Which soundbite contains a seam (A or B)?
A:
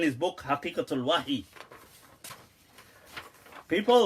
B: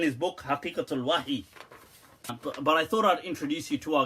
B